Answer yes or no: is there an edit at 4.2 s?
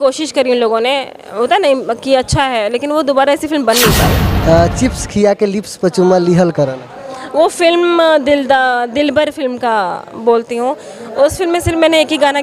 yes